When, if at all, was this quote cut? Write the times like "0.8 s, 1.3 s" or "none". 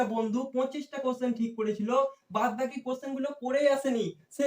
none